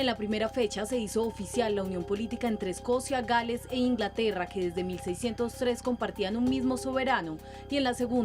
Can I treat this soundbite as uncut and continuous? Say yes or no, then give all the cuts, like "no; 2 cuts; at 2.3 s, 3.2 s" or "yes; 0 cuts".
no; 1 cut; at 3.9 s